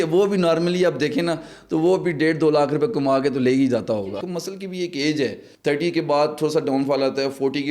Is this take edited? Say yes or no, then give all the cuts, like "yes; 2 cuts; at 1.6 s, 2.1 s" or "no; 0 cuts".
yes; 2 cuts; at 4.1 s, 5.5 s